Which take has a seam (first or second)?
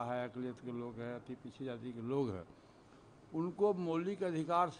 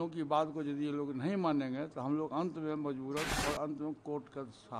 second